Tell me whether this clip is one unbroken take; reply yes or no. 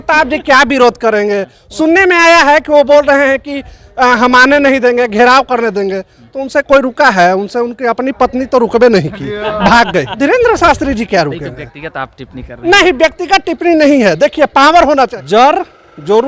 no